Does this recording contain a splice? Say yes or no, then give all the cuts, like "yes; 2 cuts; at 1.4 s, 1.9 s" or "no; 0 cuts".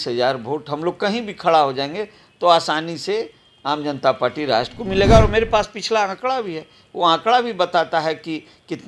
no; 0 cuts